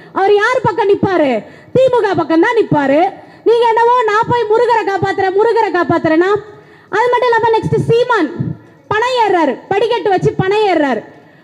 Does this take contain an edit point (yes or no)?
no